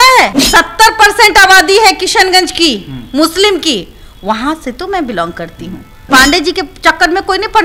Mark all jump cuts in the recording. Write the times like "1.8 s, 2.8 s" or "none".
6.1 s